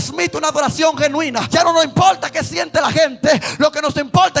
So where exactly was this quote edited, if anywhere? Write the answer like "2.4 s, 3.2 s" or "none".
1.5 s